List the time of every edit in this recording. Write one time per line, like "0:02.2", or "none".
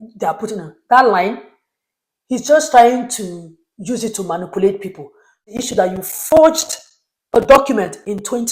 0:05.6